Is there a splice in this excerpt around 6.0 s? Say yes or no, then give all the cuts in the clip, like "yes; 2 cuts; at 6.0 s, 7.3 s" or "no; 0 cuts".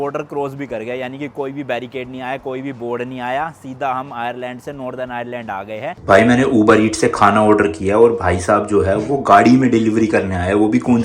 yes; 1 cut; at 6.0 s